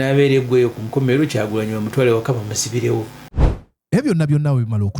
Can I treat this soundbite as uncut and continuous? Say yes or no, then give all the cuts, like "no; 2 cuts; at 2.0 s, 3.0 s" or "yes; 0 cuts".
no; 1 cut; at 3.2 s